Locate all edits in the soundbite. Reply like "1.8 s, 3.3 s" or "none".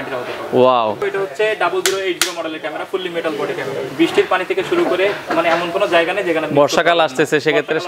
1.0 s, 3.9 s